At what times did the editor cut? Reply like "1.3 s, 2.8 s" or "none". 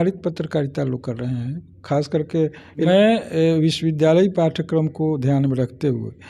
2.9 s